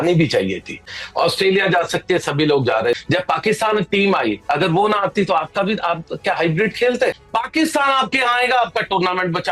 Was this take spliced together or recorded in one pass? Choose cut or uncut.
cut